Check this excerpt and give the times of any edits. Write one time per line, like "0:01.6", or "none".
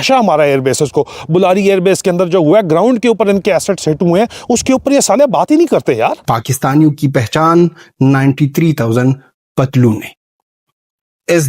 0:06.2